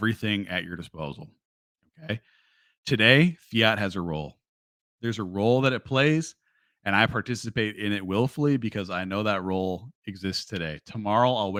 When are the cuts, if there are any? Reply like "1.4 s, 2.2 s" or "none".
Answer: none